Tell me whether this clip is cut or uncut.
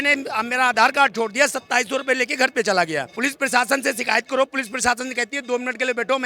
uncut